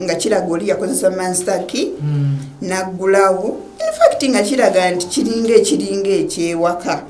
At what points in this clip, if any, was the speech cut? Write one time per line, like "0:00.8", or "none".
none